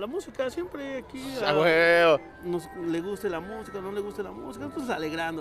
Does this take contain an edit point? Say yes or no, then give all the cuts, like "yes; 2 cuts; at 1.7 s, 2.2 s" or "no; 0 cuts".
yes; 1 cut; at 2.4 s